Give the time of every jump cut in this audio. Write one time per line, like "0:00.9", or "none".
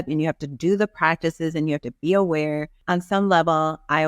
0:02.8